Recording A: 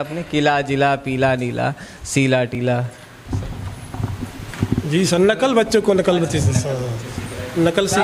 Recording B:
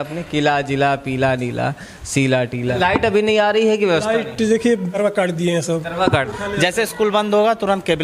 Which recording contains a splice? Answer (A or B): B